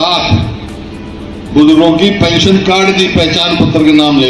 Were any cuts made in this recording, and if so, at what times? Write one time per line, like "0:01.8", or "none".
none